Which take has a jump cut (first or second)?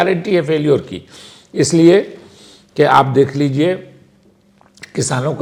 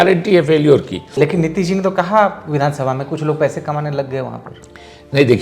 second